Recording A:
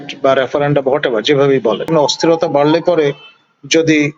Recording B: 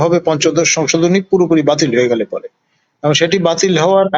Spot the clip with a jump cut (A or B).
A